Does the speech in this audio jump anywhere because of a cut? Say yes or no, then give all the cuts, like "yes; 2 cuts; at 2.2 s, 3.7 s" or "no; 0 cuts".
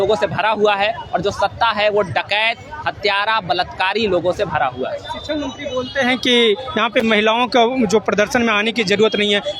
no; 0 cuts